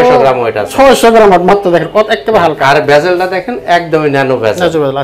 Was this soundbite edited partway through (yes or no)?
no